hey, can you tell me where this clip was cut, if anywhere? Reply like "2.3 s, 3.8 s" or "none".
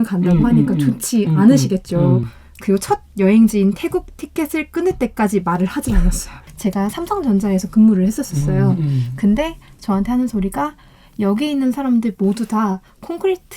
2.2 s, 6.4 s